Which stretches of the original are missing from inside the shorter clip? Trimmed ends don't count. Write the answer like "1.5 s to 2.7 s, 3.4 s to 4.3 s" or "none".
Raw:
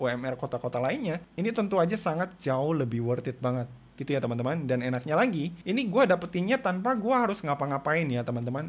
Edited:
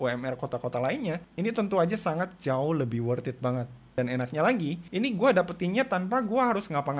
3.9 s to 4.7 s